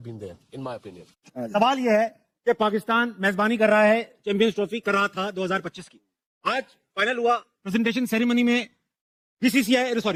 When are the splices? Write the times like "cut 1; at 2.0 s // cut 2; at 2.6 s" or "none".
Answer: none